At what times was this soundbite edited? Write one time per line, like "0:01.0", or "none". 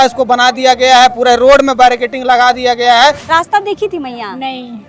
0:03.2